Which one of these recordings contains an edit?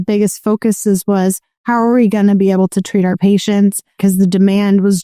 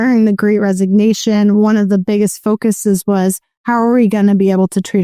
first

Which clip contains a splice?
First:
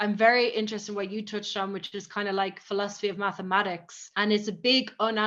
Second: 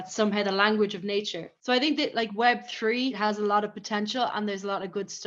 second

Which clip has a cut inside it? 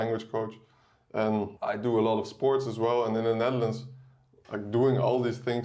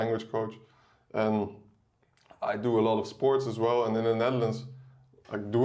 first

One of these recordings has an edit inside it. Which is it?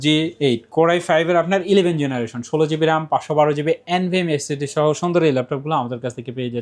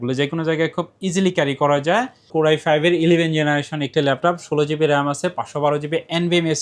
second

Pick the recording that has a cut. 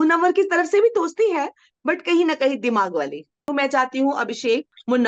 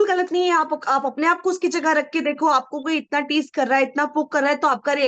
first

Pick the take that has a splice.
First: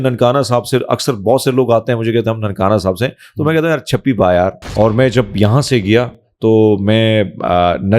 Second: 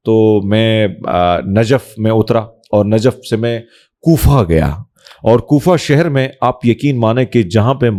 first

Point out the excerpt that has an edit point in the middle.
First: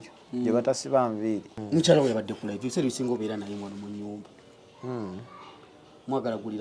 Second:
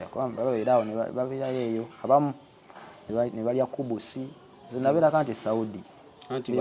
first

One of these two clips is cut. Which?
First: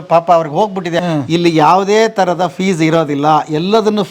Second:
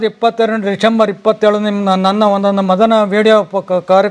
first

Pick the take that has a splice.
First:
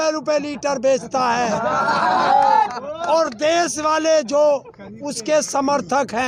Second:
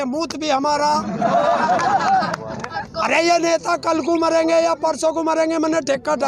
second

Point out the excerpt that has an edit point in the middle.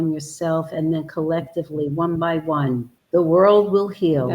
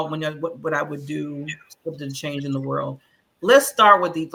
first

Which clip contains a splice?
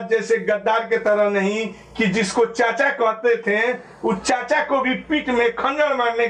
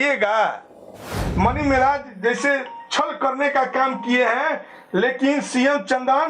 second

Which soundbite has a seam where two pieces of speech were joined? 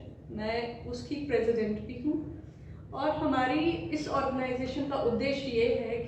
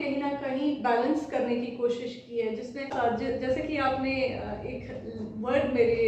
second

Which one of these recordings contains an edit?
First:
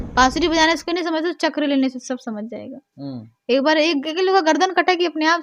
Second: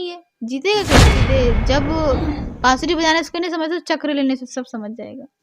second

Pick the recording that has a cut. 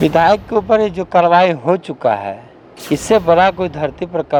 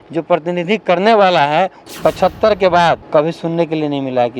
second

